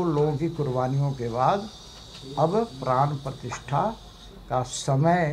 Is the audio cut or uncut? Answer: uncut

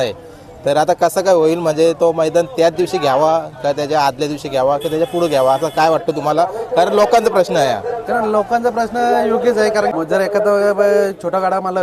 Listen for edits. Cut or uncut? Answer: cut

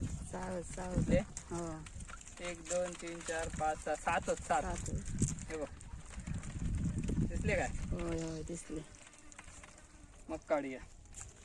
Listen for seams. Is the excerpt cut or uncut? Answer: uncut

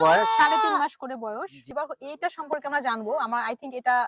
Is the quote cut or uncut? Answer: cut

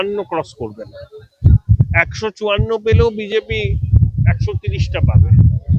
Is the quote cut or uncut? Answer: cut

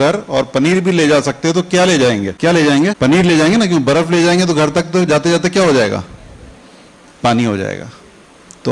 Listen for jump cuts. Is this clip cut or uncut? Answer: cut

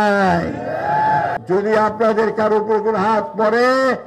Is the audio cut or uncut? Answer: cut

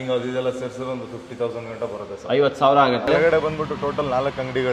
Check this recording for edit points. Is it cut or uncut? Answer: cut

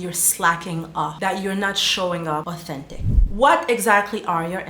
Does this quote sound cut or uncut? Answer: cut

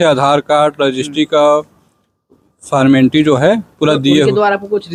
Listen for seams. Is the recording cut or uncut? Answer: uncut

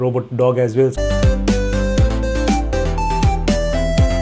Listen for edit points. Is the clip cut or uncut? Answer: uncut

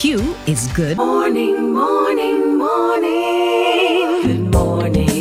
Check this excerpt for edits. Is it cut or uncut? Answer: uncut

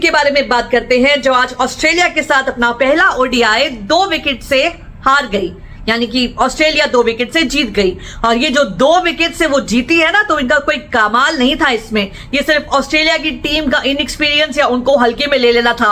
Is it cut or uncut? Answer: uncut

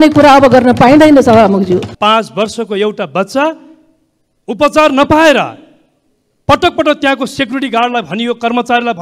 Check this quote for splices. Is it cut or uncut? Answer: cut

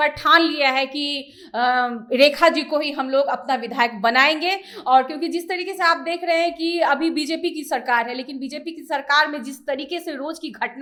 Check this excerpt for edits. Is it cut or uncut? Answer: uncut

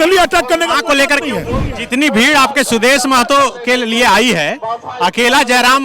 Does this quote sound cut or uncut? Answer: cut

